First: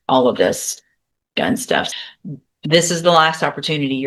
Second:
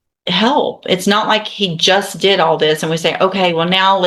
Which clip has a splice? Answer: first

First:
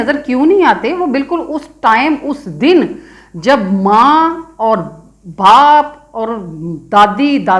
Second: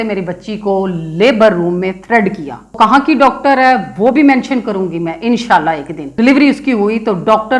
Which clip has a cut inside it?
second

